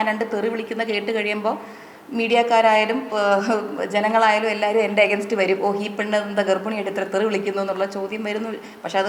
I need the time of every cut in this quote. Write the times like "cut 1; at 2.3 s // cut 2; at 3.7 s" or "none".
none